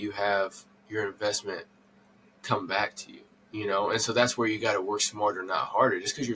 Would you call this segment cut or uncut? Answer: uncut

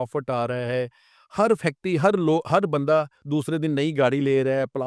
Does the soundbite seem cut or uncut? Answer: uncut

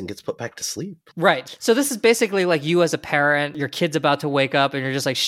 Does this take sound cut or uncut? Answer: cut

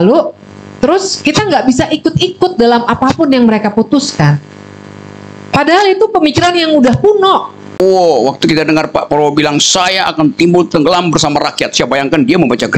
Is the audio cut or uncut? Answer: cut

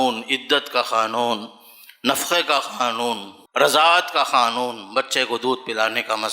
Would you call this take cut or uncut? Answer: cut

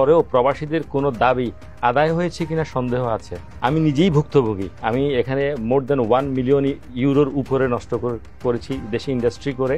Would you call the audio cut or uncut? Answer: cut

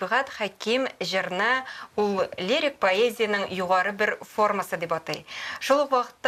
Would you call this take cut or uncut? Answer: uncut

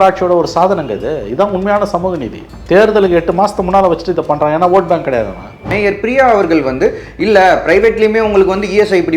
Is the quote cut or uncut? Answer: cut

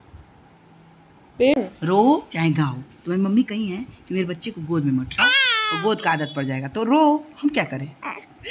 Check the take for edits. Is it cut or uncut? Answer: cut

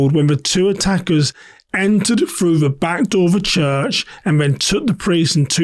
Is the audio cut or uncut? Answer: uncut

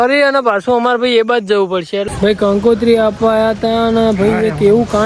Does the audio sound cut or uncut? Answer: cut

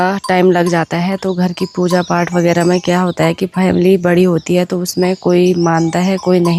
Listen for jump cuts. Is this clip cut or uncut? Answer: uncut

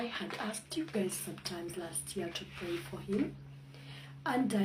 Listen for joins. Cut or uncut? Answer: uncut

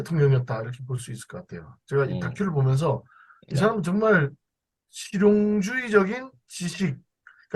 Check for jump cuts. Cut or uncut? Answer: uncut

